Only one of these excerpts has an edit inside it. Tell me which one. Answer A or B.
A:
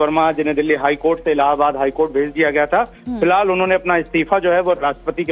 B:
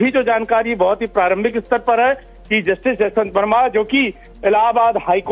A